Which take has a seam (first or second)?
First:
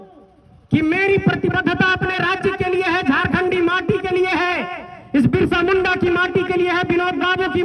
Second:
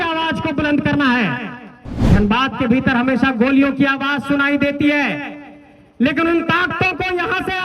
second